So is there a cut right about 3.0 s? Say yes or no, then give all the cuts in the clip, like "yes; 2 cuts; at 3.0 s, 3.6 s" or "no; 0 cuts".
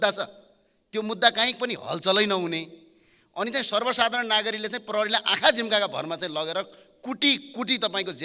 no; 0 cuts